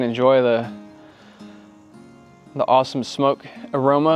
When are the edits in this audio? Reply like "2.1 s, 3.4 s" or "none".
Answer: none